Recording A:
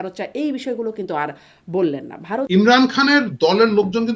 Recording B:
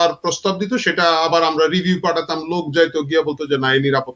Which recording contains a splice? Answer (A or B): A